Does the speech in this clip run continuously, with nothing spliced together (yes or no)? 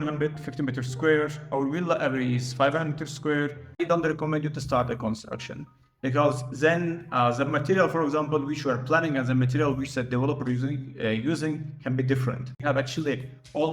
no